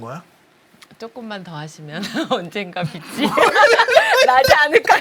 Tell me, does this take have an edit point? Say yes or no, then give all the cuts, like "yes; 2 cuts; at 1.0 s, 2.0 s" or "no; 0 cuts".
no; 0 cuts